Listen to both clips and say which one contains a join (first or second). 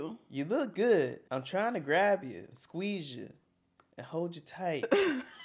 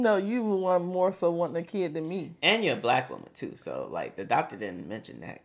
first